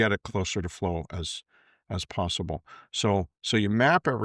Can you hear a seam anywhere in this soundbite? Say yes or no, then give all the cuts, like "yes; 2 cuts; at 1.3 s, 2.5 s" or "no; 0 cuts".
no; 0 cuts